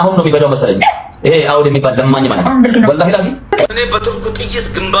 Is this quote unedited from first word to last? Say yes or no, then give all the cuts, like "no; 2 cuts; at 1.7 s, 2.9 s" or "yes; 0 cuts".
no; 1 cut; at 3.5 s